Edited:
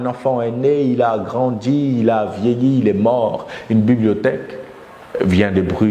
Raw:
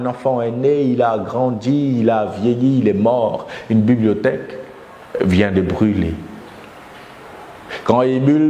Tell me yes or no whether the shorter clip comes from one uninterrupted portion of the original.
yes